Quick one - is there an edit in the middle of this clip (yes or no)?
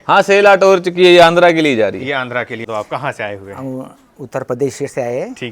yes